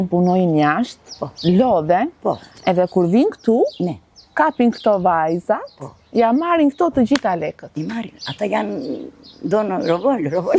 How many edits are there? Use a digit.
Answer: 0